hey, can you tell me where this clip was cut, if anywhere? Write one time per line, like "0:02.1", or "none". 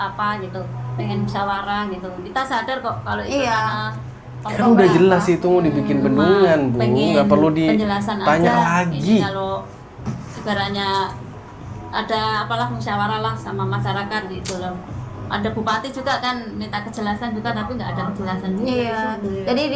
none